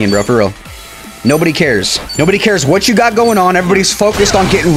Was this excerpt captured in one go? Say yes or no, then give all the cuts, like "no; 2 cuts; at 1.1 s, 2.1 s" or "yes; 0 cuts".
no; 1 cut; at 2.0 s